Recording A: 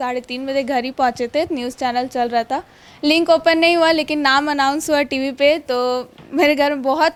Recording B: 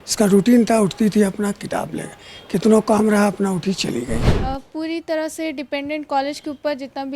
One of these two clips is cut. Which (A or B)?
B